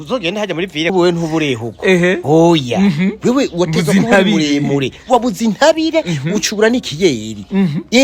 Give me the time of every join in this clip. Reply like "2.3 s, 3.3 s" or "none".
0.9 s